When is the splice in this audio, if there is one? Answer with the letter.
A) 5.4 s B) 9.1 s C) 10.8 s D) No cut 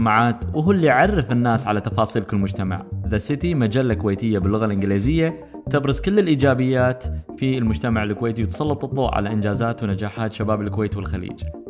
D